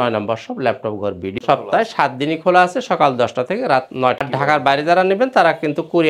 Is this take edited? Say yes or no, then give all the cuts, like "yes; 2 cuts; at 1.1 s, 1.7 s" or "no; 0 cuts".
yes; 2 cuts; at 1.3 s, 4.2 s